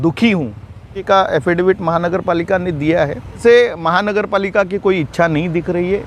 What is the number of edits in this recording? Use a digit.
2